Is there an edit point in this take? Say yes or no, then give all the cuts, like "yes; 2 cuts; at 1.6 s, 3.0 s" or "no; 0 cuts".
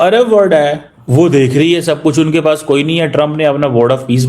yes; 1 cut; at 0.9 s